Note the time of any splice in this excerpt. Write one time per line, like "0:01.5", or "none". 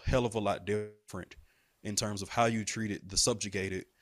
none